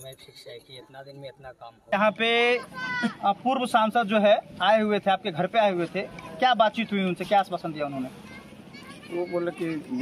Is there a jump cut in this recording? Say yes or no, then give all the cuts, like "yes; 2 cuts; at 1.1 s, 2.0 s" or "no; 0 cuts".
yes; 1 cut; at 1.9 s